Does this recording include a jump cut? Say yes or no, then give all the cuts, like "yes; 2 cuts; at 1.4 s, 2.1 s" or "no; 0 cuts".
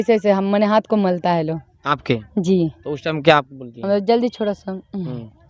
no; 0 cuts